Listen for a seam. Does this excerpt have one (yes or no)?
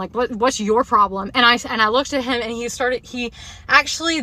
no